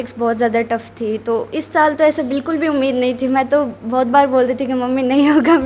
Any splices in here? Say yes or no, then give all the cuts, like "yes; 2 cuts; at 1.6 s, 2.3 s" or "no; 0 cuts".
no; 0 cuts